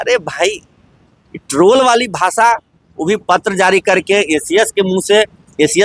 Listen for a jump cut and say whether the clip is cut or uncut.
uncut